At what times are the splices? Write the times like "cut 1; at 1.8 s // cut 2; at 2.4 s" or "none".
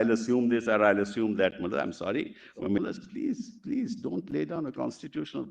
cut 1; at 2.8 s